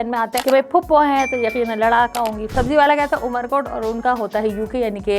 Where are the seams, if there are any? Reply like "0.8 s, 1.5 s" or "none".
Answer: 2.5 s